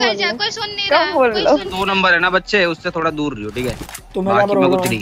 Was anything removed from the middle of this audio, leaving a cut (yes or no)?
yes